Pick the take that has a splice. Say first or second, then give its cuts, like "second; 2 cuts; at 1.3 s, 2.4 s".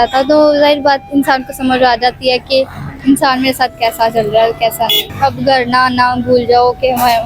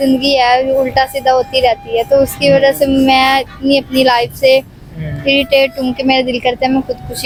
first; 1 cut; at 5.0 s